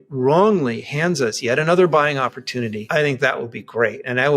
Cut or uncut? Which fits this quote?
cut